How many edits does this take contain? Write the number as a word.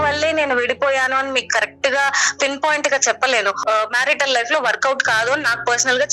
one